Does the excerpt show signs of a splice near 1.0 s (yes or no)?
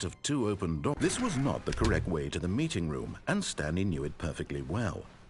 yes